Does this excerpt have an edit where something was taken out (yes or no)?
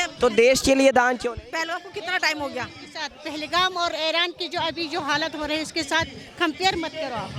no